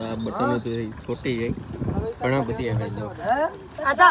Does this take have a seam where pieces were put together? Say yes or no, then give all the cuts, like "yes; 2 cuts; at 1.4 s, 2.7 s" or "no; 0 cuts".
no; 0 cuts